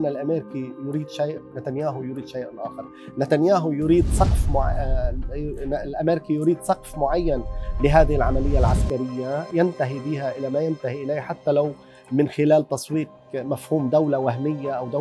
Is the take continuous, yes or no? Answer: yes